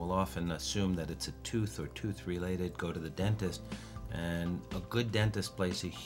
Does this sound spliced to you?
no; 0 cuts

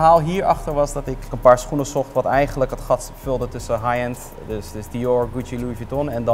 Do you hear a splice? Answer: no; 0 cuts

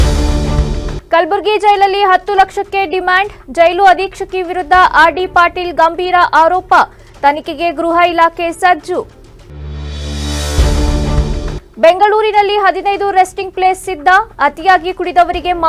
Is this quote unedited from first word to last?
yes; 0 cuts

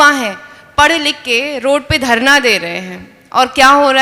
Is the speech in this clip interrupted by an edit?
no; 0 cuts

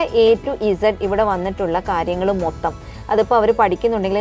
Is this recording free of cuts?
yes; 0 cuts

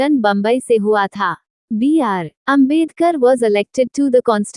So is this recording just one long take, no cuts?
yes; 0 cuts

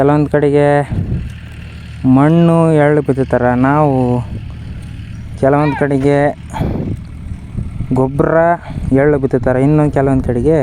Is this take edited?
no; 0 cuts

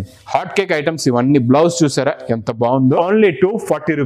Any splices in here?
yes; 1 cut; at 3.0 s

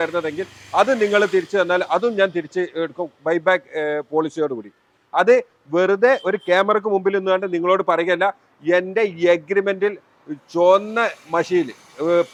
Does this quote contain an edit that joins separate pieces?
no; 0 cuts

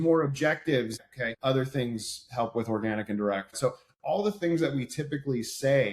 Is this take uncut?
no; 2 cuts; at 1.1 s, 3.5 s

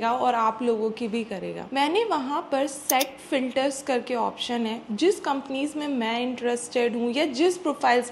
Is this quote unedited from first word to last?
yes; 0 cuts

